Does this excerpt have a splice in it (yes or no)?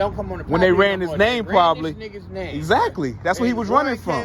no